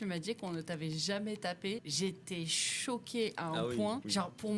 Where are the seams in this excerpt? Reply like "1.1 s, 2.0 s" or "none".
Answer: 1.9 s